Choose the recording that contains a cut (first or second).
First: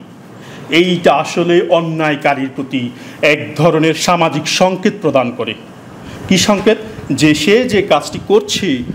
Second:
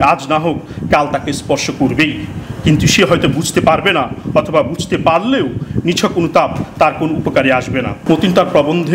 second